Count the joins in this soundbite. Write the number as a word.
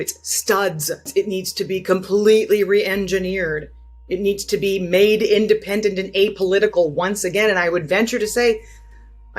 one